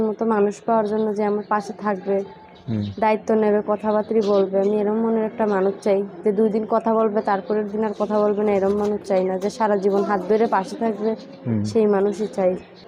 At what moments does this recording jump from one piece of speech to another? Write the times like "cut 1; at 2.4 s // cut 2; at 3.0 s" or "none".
none